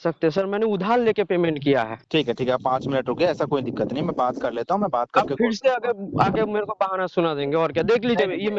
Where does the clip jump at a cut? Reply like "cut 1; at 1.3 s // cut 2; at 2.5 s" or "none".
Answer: none